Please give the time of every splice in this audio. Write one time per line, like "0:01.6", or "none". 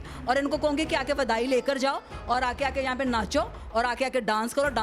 none